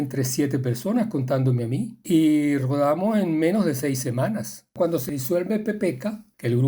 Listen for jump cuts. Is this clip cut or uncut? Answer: cut